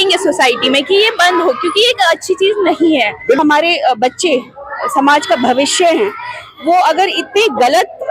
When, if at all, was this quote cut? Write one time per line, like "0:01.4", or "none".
0:03.4